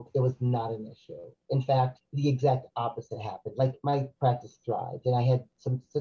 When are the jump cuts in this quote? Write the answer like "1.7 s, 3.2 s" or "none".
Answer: 2.0 s, 3.9 s